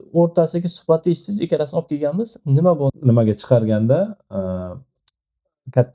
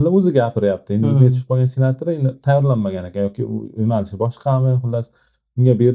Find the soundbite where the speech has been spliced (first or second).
first